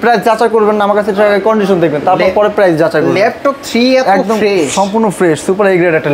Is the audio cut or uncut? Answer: uncut